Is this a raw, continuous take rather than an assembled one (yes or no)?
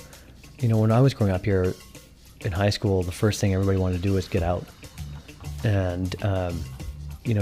yes